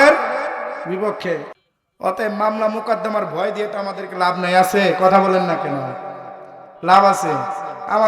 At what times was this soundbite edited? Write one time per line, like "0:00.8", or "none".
0:01.5